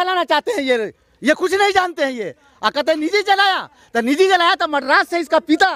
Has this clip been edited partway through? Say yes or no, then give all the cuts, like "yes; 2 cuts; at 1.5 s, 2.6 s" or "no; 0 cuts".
no; 0 cuts